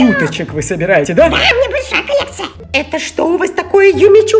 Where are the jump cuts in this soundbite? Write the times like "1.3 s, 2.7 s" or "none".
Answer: 2.2 s